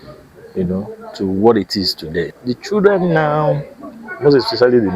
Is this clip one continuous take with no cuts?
no; 1 cut; at 2.3 s

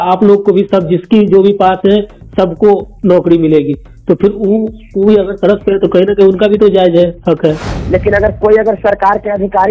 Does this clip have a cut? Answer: yes; 1 cut; at 7.7 s

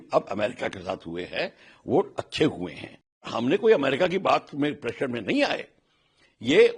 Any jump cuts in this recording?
yes; 1 cut; at 3.3 s

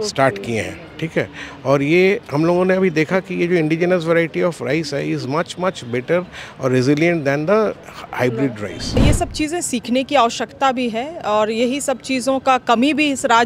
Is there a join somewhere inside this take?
yes; 1 cut; at 9.0 s

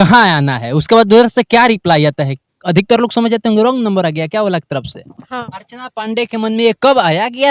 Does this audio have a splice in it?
yes; 1 cut; at 5.5 s

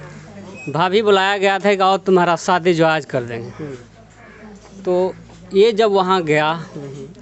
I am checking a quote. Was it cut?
no; 0 cuts

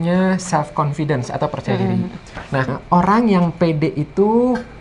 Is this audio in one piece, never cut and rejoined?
no; 1 cut; at 2.7 s

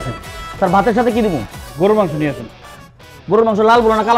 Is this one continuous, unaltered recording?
no; 1 cut; at 1.6 s

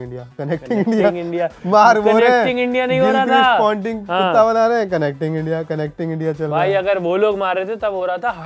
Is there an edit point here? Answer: no; 0 cuts

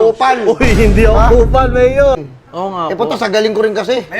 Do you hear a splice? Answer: yes; 1 cut; at 2.2 s

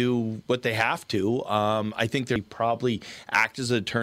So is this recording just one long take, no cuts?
no; 1 cut; at 2.4 s

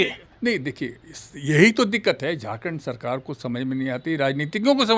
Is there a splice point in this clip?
no; 0 cuts

